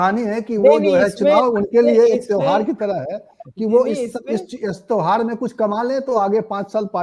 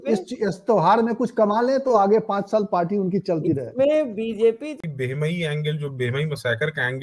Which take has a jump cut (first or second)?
second